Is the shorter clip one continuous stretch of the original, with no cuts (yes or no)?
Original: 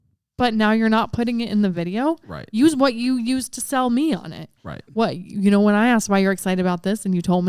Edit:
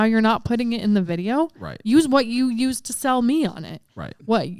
yes